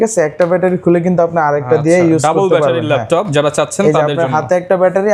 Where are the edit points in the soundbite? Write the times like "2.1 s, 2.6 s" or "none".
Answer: none